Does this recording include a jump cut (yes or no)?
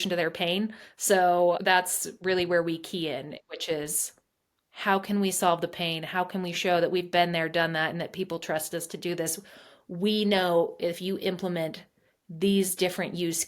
yes